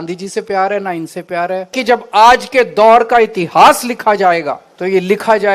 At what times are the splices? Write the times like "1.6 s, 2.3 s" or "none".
1.7 s, 4.7 s